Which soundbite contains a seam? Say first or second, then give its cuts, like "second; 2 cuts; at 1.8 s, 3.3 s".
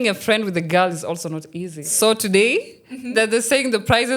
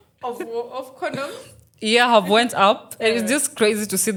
first; 1 cut; at 1.9 s